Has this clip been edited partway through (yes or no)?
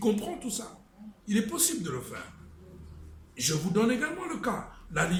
no